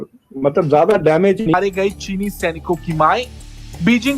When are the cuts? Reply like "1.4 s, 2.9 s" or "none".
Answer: 1.5 s